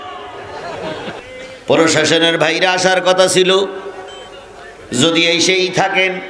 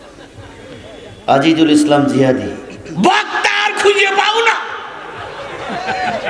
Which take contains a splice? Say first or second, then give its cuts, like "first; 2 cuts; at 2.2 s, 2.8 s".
first; 1 cut; at 1.2 s